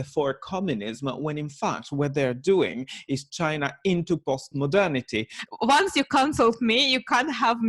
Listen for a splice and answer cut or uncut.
cut